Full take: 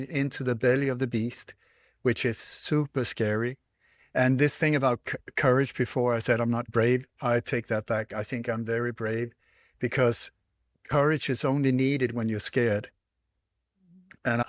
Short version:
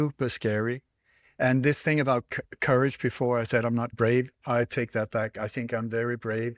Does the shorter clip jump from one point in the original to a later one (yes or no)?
no